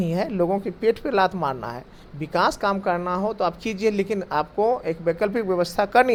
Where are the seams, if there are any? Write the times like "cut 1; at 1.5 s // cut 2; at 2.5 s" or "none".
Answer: none